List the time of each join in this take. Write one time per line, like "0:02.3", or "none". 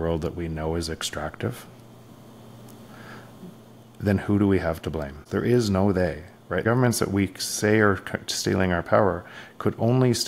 0:05.2
0:06.6